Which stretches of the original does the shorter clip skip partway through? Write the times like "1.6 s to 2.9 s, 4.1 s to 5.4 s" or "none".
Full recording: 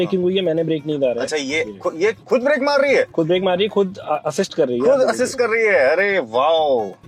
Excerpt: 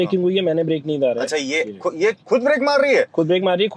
none